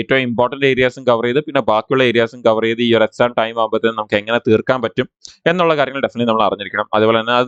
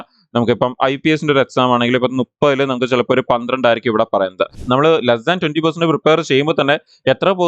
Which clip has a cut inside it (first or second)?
second